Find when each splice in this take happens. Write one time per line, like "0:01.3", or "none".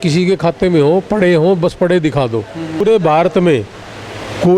0:02.8